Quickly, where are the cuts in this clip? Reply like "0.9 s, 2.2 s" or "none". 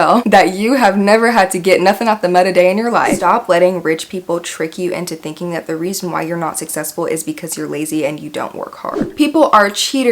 3.2 s, 9.0 s